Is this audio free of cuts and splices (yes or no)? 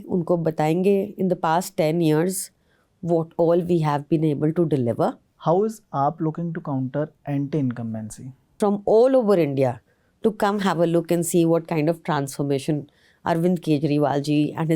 no